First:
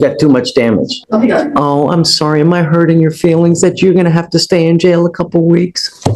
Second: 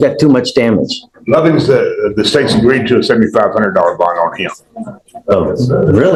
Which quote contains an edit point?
first; 1 cut; at 1.0 s

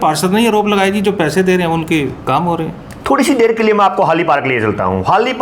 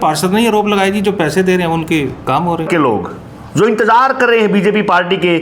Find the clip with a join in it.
second; 1 cut; at 2.7 s

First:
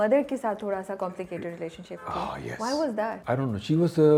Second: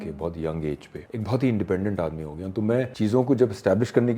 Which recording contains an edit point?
second; 2 cuts; at 1.0 s, 2.9 s

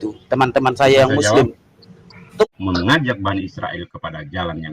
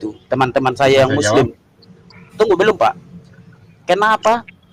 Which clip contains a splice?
first; 1 cut; at 2.5 s

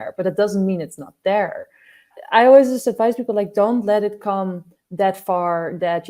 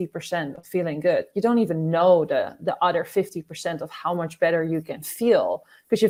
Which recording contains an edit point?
first; 1 cut; at 2.1 s

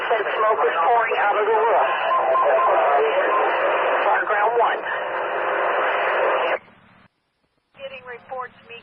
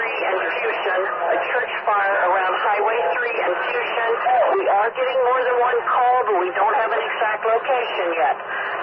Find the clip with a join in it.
first; 1 cut; at 1.8 s

